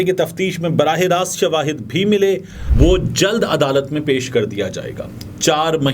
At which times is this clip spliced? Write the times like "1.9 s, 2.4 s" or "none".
2.6 s